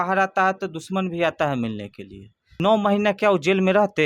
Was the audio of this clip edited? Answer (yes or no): yes